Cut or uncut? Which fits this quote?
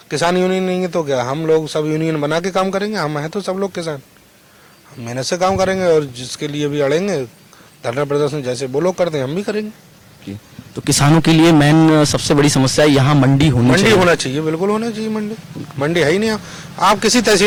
uncut